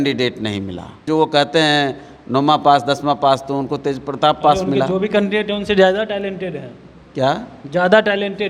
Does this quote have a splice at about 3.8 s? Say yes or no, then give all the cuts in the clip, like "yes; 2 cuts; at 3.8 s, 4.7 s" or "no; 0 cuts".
no; 1 cut; at 1.0 s